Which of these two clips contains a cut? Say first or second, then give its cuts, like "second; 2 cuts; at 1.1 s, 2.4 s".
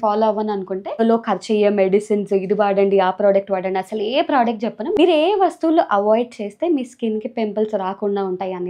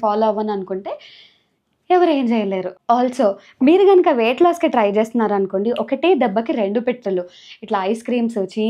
first; 2 cuts; at 1.0 s, 4.8 s